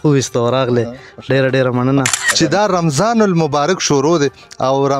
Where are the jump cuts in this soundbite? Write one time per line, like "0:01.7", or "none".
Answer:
0:02.2